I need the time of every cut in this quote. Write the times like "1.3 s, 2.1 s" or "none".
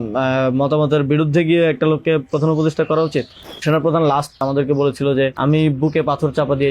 3.6 s, 4.4 s, 5.3 s